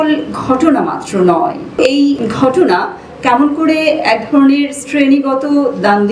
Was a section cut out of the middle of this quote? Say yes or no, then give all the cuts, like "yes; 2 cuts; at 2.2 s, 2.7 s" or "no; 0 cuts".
yes; 1 cut; at 1.9 s